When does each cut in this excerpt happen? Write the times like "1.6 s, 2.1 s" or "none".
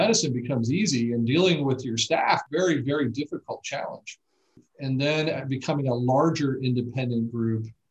2.4 s